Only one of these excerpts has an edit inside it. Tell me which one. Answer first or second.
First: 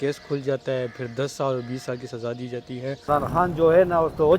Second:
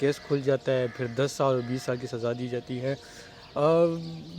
first